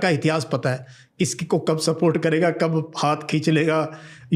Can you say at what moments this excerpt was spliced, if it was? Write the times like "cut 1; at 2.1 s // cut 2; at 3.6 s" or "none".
none